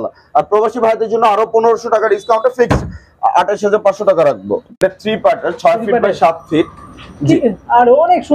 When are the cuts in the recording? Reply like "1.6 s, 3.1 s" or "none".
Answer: 4.6 s